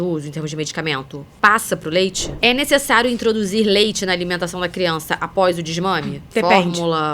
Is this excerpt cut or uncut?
cut